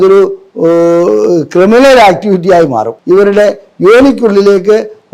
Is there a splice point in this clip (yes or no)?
yes